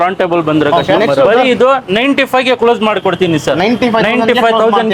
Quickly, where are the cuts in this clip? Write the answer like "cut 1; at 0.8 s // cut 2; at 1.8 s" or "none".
cut 1; at 1.4 s